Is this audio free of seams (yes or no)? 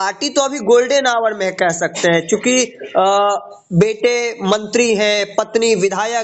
yes